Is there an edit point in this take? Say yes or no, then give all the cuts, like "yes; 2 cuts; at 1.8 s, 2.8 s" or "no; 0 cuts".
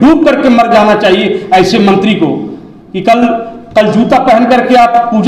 no; 0 cuts